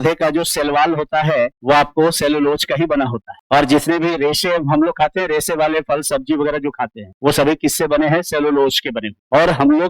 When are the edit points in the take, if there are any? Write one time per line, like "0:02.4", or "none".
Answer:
0:01.6

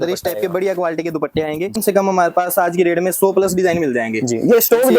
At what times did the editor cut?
0:01.8

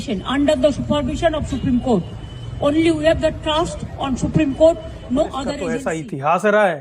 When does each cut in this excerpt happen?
0:05.7

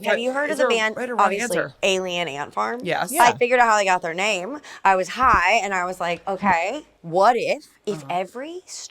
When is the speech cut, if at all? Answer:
0:06.9

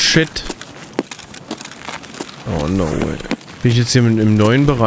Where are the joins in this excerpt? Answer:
0:03.5

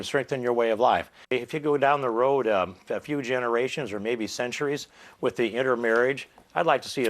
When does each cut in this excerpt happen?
0:01.3

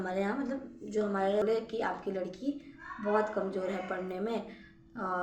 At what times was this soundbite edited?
0:01.4

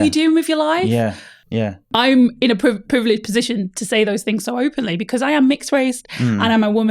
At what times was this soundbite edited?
0:01.9

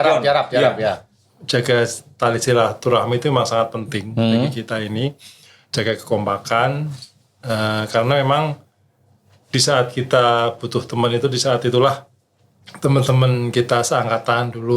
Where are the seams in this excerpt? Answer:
0:01.1

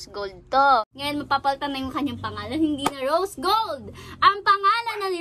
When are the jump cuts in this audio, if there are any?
0:01.0

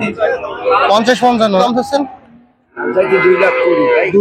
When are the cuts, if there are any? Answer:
0:01.6

